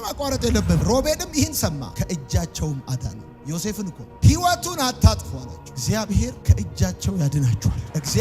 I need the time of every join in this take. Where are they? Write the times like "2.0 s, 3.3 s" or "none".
0.8 s, 4.1 s, 5.7 s